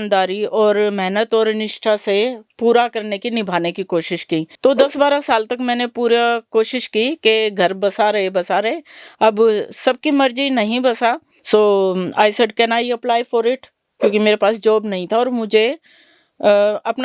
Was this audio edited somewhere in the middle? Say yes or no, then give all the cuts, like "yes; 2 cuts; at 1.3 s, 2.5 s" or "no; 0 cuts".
yes; 2 cuts; at 4.5 s, 11.3 s